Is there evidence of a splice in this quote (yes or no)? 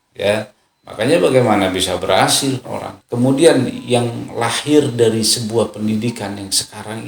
yes